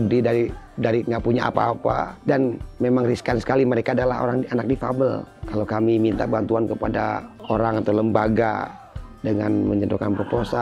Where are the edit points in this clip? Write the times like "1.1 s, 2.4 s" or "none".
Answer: 2.1 s, 5.3 s, 7.3 s